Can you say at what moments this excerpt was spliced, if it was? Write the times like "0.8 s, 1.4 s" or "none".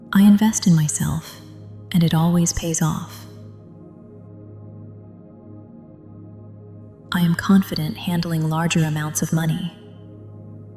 3.1 s, 5.3 s, 7.1 s, 9.7 s